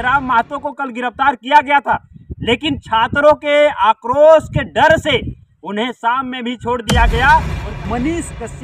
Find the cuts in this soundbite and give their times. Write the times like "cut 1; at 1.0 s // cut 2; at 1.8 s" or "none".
cut 1; at 7.6 s